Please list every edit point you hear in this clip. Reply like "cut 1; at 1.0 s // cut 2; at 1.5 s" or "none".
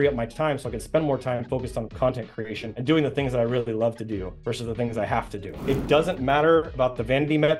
cut 1; at 5.5 s